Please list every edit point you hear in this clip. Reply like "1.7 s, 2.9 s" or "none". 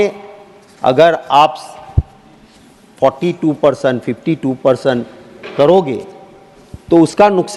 none